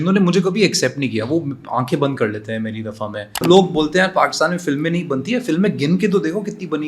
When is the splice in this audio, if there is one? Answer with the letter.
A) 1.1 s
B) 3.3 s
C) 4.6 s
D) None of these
B